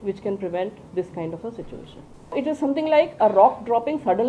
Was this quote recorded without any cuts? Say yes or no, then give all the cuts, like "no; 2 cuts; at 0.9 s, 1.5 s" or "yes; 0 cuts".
no; 1 cut; at 2.3 s